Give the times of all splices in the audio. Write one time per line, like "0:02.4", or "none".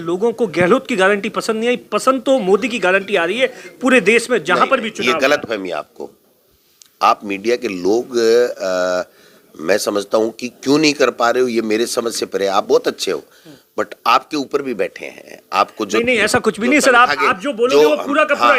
none

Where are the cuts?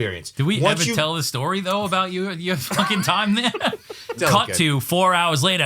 0:04.2

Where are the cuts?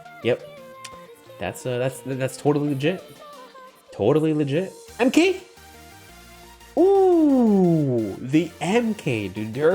0:04.8

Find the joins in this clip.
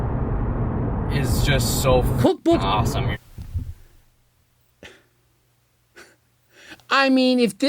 0:03.2

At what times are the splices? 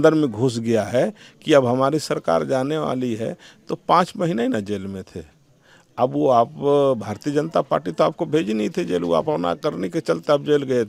none

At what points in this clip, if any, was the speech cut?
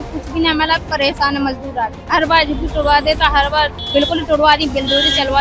0:02.0
0:03.8

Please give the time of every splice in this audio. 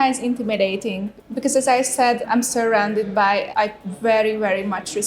0:01.1
0:02.2
0:03.5

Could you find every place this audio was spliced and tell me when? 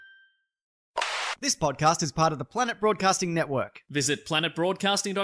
0:00.9

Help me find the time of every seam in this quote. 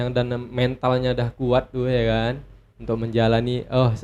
none

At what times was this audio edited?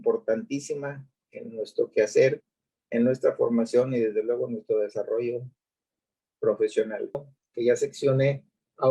0:07.2

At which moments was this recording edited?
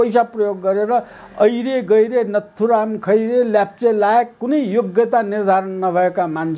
none

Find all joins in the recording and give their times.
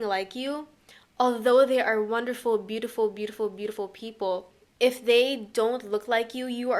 0:04.6

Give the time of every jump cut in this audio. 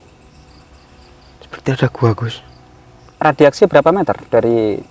0:03.1

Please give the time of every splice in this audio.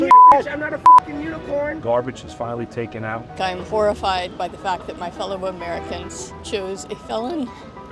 0:01.8
0:03.3

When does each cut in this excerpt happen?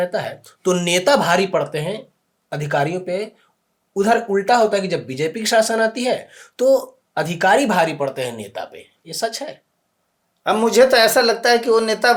none

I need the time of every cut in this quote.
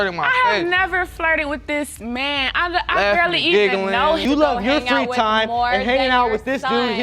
0:04.2

